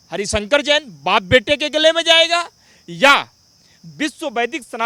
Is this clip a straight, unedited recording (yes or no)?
yes